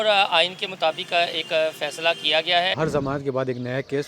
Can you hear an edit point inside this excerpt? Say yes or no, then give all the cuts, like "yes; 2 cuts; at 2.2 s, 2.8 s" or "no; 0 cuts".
yes; 1 cut; at 2.8 s